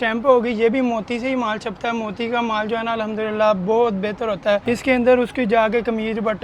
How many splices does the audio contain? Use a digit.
1